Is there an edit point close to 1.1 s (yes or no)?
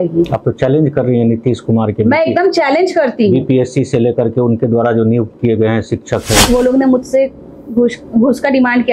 no